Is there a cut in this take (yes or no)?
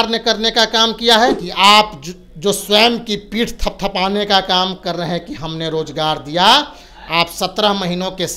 yes